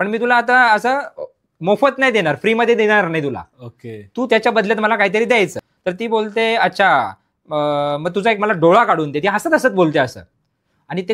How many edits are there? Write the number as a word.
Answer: one